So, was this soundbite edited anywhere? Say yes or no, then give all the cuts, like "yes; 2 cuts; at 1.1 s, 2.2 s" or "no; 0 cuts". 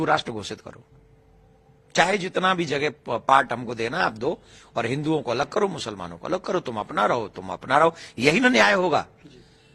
no; 0 cuts